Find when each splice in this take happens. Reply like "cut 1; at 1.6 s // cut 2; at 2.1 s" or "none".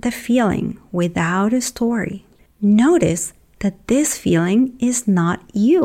cut 1; at 2.3 s